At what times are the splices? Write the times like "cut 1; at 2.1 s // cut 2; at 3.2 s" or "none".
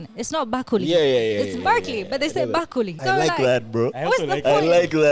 cut 1; at 3.0 s